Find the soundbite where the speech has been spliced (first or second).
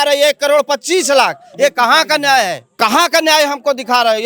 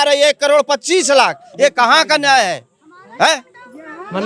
first